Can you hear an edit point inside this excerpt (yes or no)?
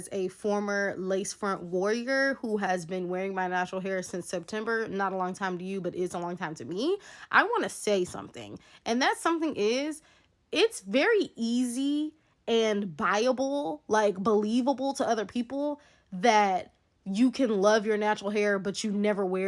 no